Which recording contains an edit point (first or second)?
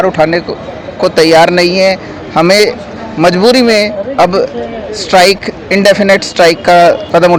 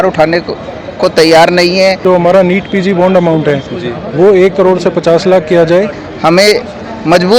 second